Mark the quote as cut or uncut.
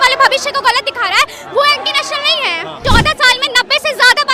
cut